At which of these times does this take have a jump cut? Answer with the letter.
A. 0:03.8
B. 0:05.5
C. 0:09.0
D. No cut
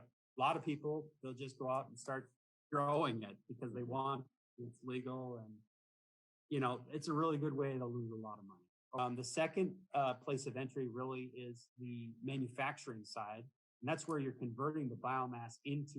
C